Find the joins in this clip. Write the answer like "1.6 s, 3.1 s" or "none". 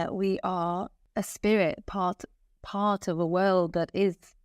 1.0 s

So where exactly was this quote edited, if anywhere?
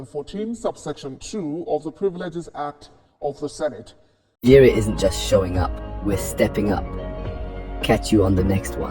4.4 s

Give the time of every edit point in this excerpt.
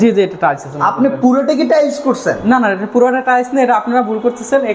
none

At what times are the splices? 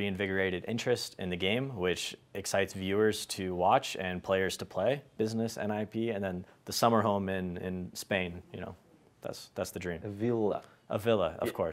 5.1 s

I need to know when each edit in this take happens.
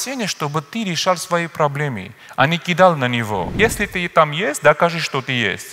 3.5 s

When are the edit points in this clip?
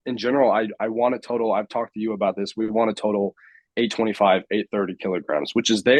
none

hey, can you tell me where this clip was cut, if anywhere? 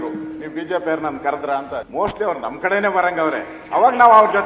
1.9 s

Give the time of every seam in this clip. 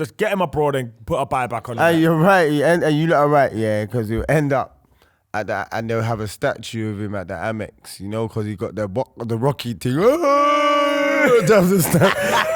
1.8 s

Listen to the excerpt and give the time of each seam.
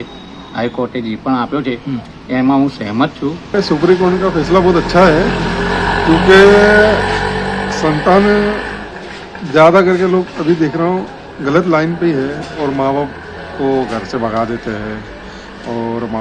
3.6 s

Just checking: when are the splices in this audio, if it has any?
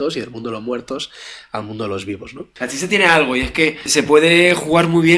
2.4 s, 3.9 s

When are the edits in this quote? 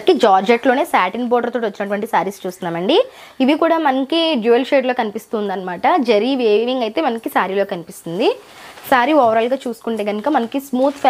none

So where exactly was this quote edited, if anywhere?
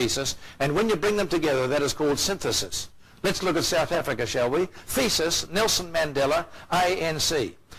none

